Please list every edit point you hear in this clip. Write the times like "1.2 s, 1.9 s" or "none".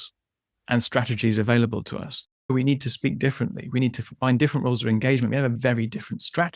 2.5 s, 4.1 s, 5.6 s